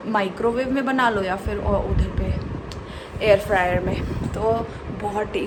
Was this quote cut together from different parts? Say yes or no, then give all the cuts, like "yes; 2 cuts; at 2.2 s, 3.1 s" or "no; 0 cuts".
no; 0 cuts